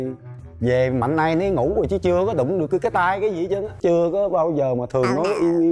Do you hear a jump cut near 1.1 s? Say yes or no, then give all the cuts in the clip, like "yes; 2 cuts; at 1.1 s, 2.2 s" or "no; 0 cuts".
no; 1 cut; at 3.8 s